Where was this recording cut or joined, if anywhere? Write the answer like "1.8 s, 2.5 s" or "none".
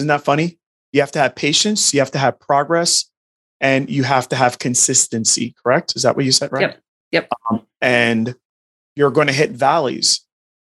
none